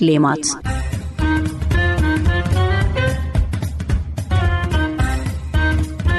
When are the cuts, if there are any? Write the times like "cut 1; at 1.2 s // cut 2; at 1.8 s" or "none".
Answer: none